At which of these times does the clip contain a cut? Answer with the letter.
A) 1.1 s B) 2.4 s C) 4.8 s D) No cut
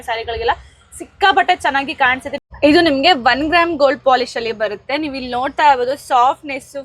B